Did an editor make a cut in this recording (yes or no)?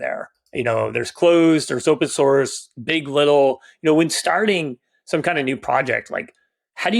no